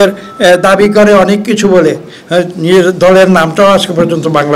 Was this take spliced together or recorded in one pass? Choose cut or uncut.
uncut